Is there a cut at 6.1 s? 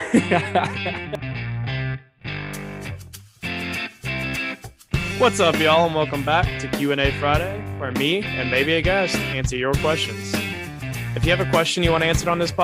no; 1 cut; at 1.0 s

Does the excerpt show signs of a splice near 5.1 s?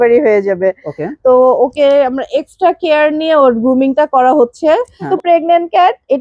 yes; 1 cut; at 5.1 s

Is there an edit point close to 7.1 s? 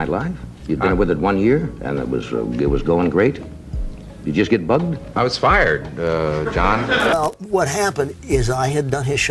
yes; 1 cut; at 7.1 s

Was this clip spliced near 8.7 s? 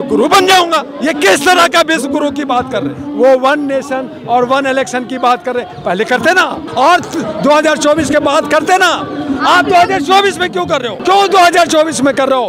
no; 4 cuts; at 0.9 s, 3.0 s, 6.6 s, 10.9 s

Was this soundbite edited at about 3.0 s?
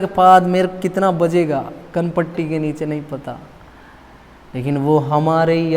no; 0 cuts

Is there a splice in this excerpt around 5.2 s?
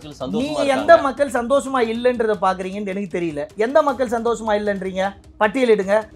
yes; 1 cut; at 5.2 s

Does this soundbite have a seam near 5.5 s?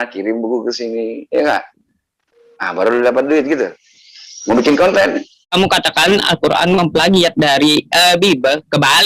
yes; 1 cut; at 5.5 s

